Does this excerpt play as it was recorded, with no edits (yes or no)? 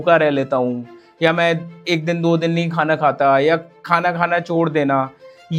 yes